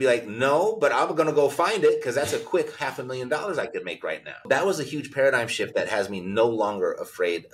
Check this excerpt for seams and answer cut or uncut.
cut